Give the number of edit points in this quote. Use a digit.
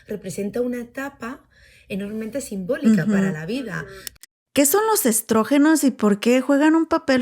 2